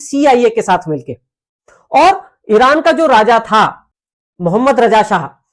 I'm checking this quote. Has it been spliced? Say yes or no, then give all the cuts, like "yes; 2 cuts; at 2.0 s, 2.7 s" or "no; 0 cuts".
no; 0 cuts